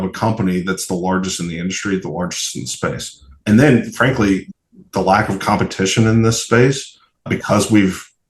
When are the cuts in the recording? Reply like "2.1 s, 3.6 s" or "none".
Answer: 3.4 s, 4.5 s, 7.3 s